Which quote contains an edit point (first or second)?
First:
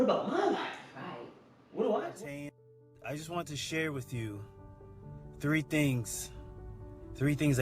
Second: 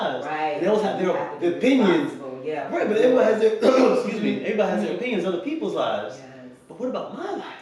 first